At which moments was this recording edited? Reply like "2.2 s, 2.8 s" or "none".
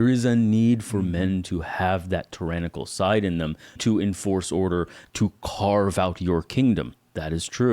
3.8 s, 5.0 s